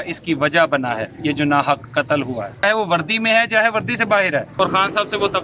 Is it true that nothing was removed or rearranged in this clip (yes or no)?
no